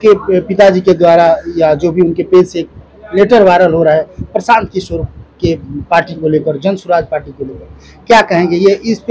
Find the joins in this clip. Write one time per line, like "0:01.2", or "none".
none